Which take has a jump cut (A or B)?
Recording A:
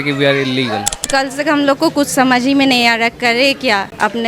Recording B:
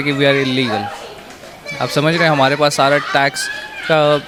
A